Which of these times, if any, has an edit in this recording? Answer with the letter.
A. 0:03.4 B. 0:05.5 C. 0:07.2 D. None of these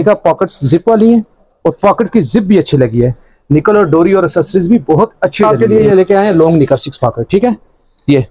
B